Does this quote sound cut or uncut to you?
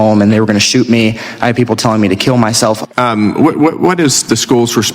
cut